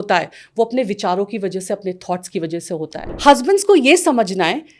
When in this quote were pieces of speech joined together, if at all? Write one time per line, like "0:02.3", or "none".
0:03.1